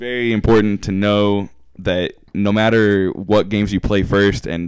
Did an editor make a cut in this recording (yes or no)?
no